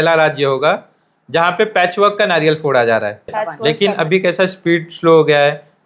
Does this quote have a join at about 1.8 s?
no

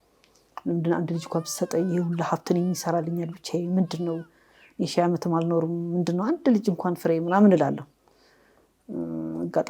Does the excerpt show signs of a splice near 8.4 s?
no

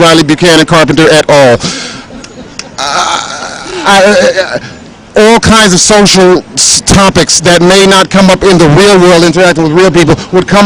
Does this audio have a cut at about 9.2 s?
yes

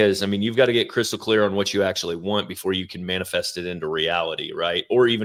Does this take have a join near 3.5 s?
no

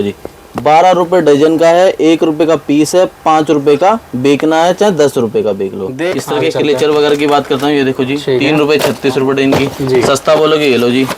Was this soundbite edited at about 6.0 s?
yes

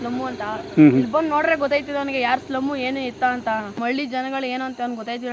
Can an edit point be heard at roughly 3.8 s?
yes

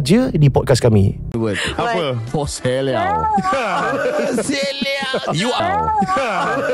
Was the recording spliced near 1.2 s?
yes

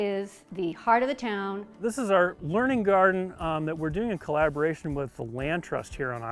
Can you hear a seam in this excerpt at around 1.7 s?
yes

